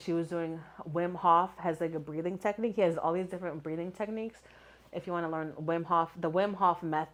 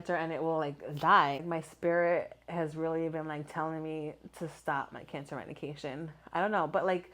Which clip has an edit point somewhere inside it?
second; 1 cut; at 1.4 s

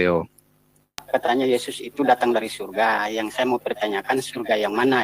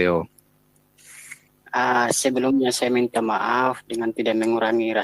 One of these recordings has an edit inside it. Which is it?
first; 1 cut; at 1.1 s

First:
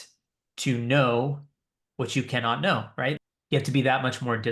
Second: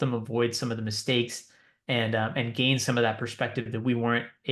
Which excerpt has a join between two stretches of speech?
first; 1 cut; at 3.2 s

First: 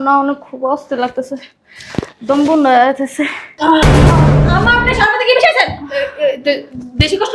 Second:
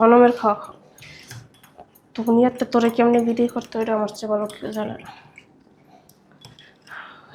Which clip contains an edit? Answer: first; 1 cut; at 3.5 s

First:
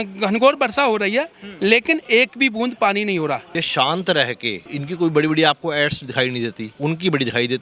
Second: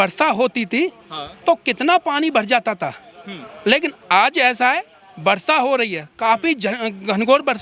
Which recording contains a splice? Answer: first; 3 cuts; at 3.6 s, 4.7 s, 6.7 s

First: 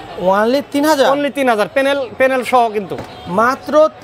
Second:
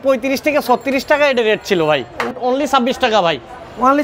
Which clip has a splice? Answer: second; 1 cut; at 2.3 s

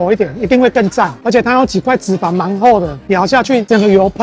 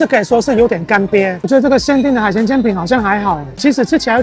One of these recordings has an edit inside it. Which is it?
second; 1 cut; at 1.4 s

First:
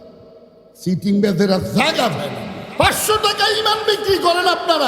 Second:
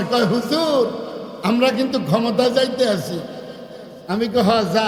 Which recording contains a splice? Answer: first; 1 cut; at 2.6 s

